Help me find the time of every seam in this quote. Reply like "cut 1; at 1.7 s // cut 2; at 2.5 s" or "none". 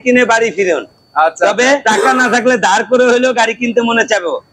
cut 1; at 1.8 s